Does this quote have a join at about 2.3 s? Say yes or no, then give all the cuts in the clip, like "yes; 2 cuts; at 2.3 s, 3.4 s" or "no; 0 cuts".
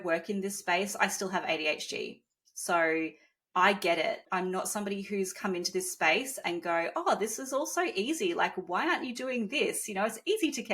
no; 1 cut; at 4.2 s